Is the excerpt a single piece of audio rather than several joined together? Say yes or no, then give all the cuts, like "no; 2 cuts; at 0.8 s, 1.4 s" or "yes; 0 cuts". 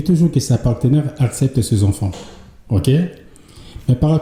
yes; 0 cuts